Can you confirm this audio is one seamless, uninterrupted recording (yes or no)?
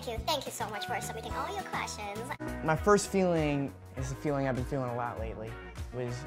no